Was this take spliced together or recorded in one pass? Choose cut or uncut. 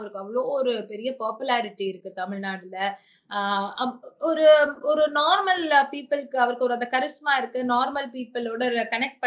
uncut